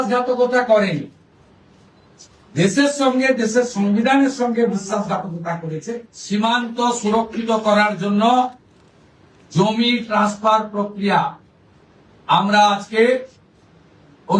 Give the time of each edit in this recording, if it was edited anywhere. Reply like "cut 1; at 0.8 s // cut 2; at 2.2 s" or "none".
cut 1; at 6.1 s